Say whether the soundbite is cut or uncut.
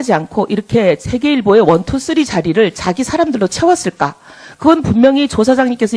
uncut